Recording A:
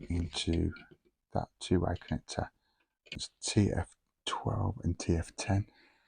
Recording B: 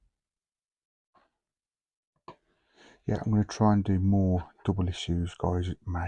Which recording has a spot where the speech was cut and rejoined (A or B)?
A